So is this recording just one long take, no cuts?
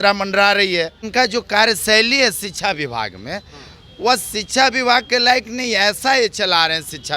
no; 1 cut; at 1.0 s

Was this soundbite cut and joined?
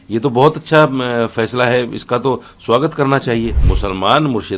yes; 1 cut; at 3.6 s

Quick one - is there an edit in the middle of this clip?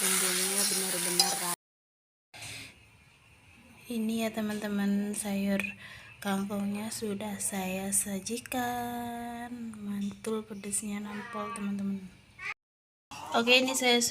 yes; 1 cut; at 1.5 s

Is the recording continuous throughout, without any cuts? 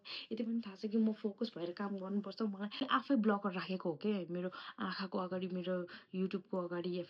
no; 1 cut; at 2.8 s

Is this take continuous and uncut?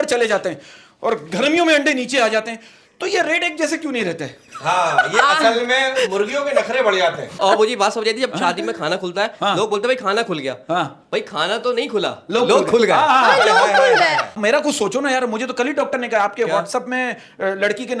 no; 2 cuts; at 7.4 s, 14.3 s

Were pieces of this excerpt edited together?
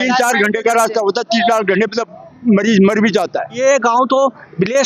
yes; 1 cut; at 3.6 s

